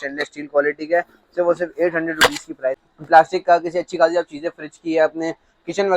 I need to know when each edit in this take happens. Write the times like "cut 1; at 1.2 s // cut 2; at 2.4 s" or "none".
cut 1; at 2.9 s